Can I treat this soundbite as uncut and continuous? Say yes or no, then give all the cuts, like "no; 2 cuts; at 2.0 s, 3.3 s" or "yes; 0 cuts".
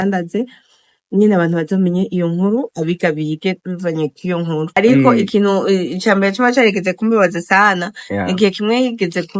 no; 1 cut; at 4.7 s